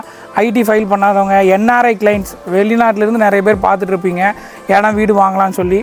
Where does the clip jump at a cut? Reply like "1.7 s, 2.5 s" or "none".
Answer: none